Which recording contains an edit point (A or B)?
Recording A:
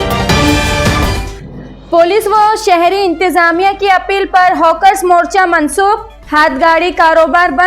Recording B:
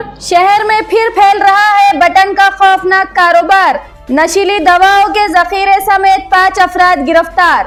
A